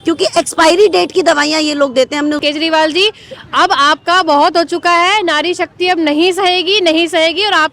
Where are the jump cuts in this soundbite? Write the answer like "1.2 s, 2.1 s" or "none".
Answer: 2.4 s